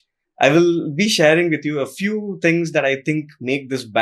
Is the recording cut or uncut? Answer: uncut